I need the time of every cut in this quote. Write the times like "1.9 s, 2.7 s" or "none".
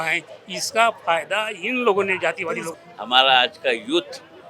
2.7 s